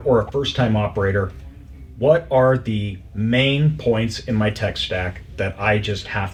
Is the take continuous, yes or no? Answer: yes